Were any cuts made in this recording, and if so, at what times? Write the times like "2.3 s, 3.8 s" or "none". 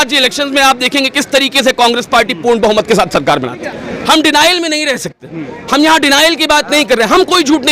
3.6 s